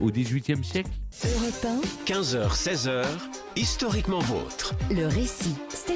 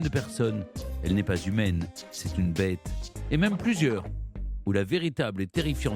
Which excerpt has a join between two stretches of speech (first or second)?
first